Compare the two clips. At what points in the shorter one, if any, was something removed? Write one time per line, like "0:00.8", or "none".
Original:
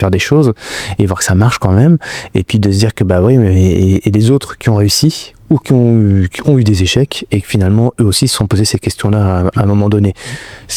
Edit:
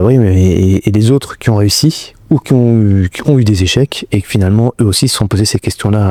none